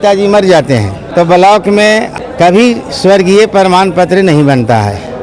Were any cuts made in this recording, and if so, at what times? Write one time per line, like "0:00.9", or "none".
0:01.0
0:02.1